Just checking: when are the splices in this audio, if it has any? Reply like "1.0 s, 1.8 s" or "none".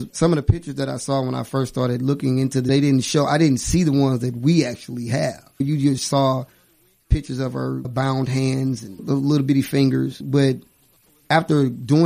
none